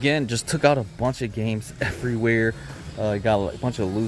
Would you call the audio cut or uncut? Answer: uncut